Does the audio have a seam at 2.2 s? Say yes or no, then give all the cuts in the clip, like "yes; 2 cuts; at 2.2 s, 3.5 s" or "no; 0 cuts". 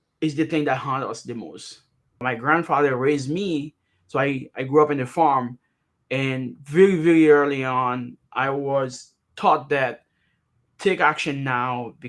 yes; 1 cut; at 2.2 s